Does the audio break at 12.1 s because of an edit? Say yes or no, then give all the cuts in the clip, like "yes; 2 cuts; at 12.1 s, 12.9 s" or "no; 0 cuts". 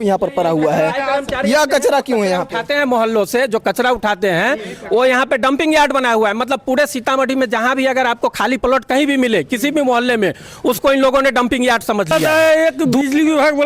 yes; 1 cut; at 12.1 s